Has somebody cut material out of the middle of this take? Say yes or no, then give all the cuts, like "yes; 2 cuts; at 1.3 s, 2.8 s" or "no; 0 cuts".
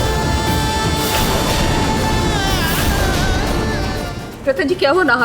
yes; 1 cut; at 4.1 s